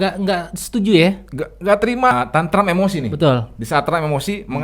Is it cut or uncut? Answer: cut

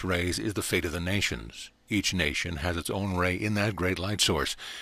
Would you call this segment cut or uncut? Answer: uncut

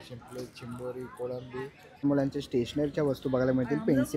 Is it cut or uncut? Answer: cut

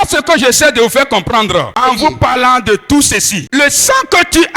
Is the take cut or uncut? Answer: cut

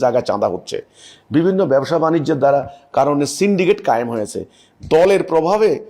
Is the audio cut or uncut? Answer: uncut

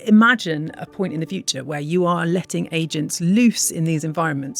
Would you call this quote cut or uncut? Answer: uncut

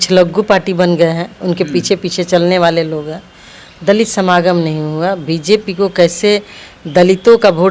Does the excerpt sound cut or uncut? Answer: uncut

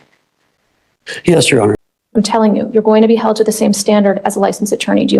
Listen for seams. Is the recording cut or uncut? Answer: cut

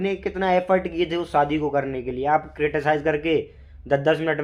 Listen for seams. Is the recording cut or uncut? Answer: uncut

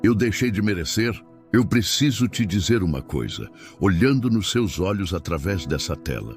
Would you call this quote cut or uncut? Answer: cut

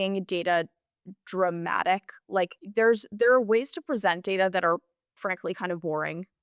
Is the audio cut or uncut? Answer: cut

